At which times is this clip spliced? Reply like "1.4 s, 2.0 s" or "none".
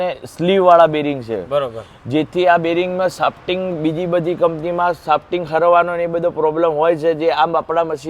none